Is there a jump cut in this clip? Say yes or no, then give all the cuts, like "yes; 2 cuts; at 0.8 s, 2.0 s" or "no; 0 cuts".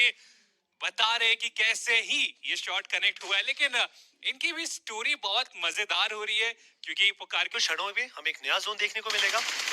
yes; 1 cut; at 7.5 s